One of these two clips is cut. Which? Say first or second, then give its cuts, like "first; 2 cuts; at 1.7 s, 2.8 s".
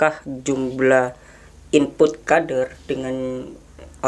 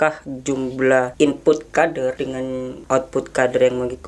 second; 2 cuts; at 1.1 s, 2.3 s